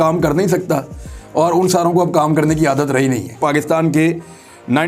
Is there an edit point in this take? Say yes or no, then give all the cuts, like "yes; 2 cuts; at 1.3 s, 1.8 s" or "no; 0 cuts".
yes; 1 cut; at 3.4 s